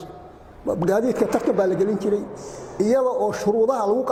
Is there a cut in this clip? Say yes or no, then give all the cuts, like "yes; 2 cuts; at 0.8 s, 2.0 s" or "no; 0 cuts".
no; 0 cuts